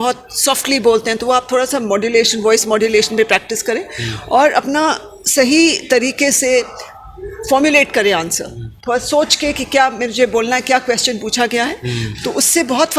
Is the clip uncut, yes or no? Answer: yes